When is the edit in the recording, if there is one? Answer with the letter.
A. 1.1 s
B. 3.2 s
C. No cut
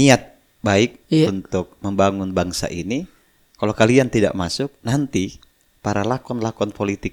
C